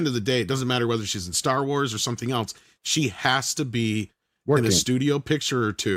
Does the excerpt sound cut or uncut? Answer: uncut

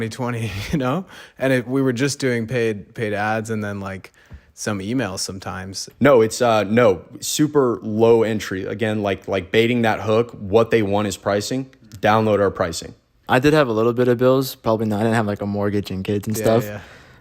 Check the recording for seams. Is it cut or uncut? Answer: cut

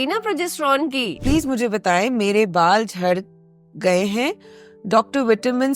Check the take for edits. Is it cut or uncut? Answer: cut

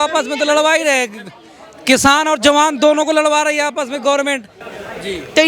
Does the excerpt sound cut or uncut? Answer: cut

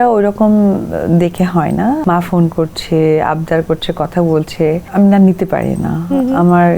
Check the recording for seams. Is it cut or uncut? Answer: cut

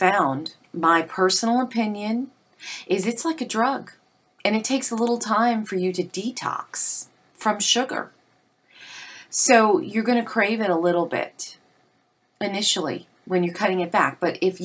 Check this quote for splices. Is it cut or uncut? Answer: uncut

